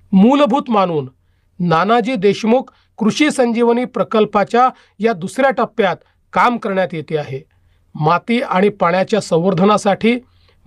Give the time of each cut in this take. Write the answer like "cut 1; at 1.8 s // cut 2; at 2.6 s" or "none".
none